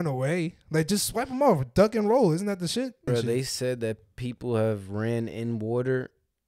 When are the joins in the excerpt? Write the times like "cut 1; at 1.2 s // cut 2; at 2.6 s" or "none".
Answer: cut 1; at 3.1 s